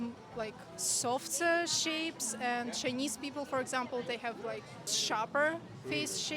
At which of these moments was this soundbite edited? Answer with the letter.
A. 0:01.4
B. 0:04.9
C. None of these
B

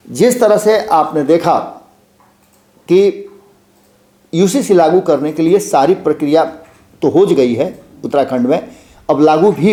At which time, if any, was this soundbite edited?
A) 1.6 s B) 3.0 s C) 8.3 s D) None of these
D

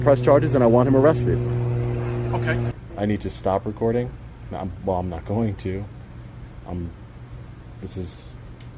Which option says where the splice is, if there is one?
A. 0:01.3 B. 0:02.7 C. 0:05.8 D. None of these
B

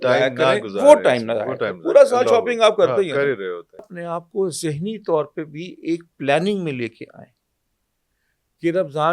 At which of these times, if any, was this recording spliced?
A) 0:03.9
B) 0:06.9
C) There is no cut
A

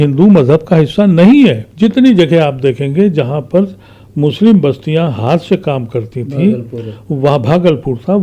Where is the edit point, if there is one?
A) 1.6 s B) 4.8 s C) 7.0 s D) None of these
A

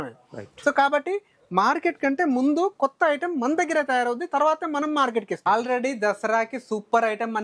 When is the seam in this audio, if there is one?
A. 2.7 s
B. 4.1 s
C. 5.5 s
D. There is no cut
C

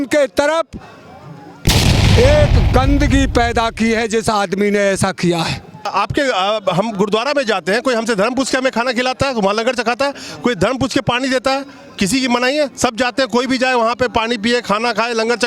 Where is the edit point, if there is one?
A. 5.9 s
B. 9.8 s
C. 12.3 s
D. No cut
A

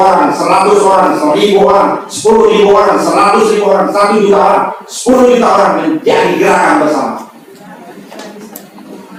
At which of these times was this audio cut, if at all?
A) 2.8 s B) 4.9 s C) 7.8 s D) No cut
D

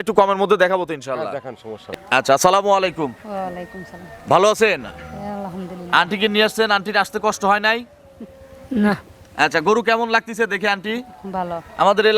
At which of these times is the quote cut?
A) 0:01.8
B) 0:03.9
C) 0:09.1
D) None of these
A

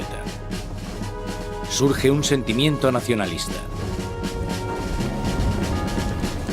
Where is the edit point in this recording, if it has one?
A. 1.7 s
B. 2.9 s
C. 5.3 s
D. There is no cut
C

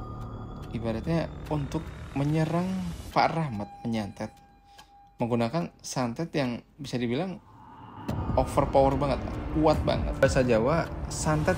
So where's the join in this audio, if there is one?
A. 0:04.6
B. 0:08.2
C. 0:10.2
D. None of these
C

